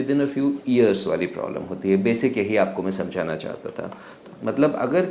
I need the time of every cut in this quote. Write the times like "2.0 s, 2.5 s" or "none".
4.1 s